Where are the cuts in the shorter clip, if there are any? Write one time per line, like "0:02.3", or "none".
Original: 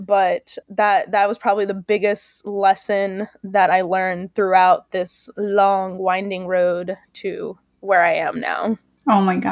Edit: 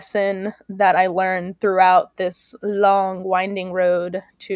none